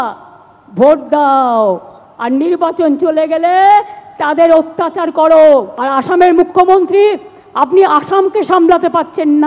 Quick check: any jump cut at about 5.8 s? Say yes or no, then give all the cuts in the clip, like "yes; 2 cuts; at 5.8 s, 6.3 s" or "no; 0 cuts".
yes; 1 cut; at 5.8 s